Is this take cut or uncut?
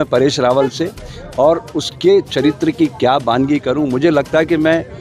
uncut